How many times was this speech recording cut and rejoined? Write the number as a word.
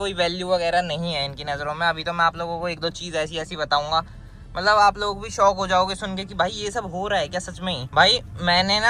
zero